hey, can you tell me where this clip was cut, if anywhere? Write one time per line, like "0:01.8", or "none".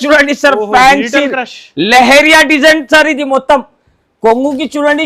none